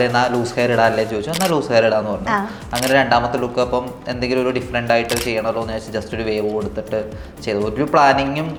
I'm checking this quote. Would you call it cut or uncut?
uncut